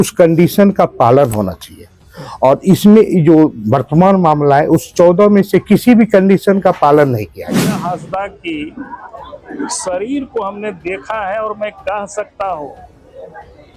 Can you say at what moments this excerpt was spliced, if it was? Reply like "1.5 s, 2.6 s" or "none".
7.7 s